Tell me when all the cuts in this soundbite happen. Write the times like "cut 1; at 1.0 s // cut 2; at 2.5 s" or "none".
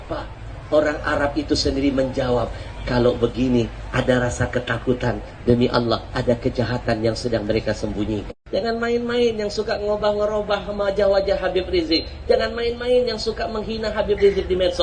cut 1; at 8.4 s